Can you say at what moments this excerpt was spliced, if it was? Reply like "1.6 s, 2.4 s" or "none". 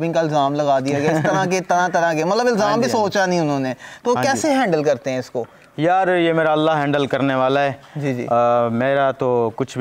none